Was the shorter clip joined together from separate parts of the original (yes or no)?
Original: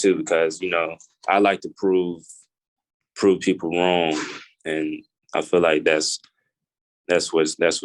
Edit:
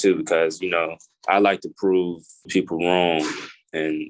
yes